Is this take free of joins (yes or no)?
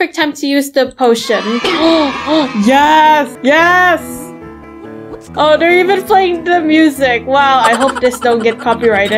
yes